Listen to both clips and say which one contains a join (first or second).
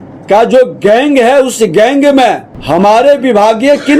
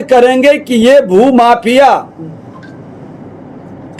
first